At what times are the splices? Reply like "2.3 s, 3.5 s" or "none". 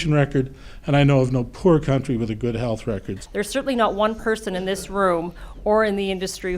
3.2 s